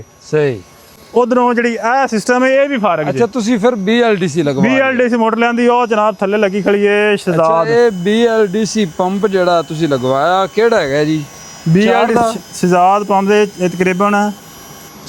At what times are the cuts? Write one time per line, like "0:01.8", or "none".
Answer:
none